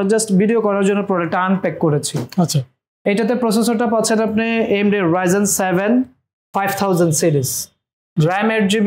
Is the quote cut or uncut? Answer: uncut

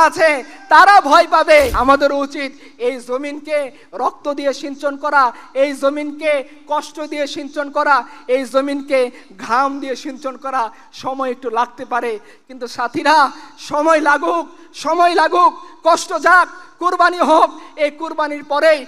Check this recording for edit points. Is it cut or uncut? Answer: cut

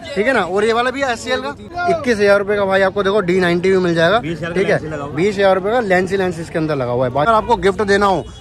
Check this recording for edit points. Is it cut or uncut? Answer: cut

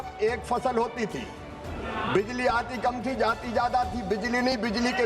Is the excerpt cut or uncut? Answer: uncut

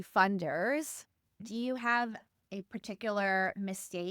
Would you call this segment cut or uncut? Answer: cut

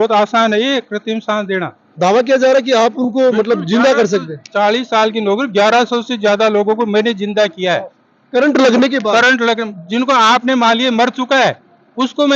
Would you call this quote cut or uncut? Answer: cut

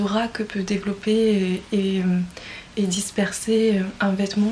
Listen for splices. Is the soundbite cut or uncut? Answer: uncut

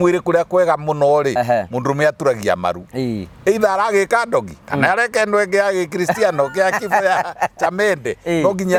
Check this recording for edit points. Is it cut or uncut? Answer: uncut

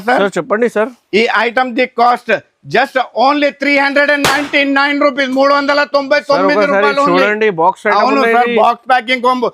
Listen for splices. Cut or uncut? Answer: uncut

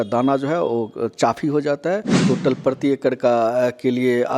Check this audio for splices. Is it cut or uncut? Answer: cut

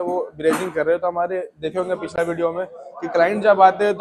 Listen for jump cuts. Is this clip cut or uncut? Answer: uncut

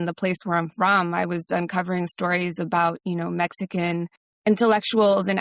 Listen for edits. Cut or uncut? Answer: cut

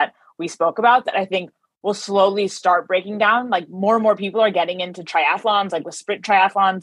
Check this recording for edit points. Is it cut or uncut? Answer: uncut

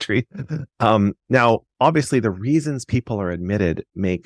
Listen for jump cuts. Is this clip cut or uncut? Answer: uncut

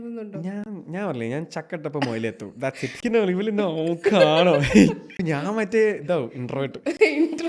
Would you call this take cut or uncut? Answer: cut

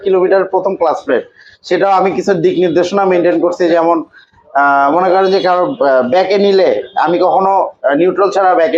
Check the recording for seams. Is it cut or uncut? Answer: uncut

